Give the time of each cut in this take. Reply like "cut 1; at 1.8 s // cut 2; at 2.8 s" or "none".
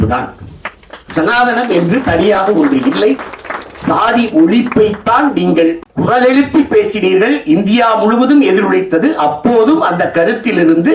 cut 1; at 5.9 s